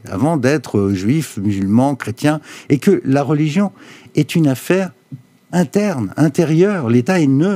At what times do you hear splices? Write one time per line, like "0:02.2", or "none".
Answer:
none